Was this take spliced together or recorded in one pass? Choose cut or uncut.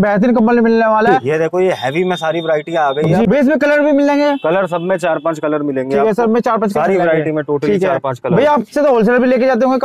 cut